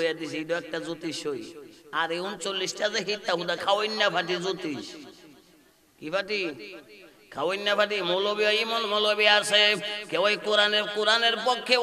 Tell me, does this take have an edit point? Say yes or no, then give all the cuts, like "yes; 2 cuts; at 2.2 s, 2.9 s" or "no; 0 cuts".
no; 0 cuts